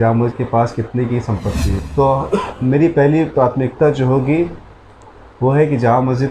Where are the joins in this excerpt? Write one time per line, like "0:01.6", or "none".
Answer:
0:01.7